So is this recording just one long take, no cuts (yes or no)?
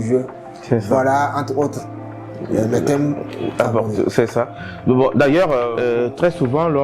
no